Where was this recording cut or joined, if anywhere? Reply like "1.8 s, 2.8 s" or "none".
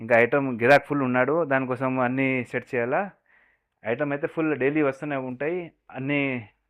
none